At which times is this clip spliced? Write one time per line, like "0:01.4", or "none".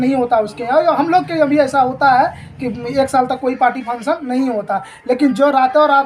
none